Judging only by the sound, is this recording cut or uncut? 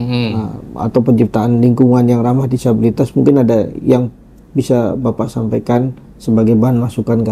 uncut